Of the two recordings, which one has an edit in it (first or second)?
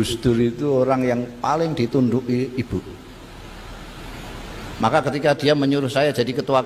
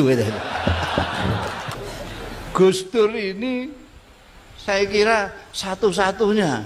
second